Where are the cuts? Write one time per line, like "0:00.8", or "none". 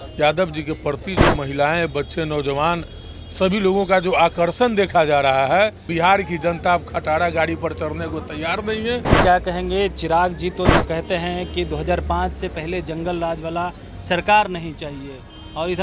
0:05.9
0:09.1